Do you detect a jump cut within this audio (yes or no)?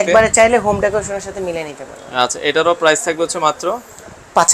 no